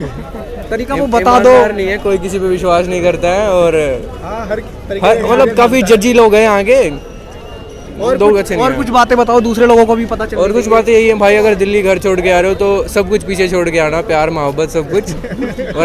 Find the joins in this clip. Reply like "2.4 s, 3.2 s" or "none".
none